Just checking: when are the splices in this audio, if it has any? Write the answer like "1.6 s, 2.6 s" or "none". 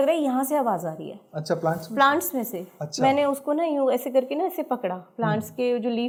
none